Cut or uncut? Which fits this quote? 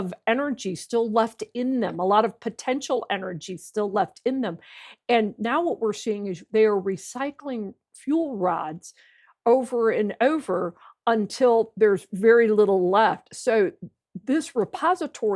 uncut